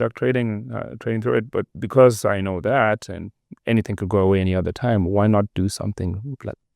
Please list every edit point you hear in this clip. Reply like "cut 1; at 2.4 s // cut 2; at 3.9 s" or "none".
cut 1; at 1.8 s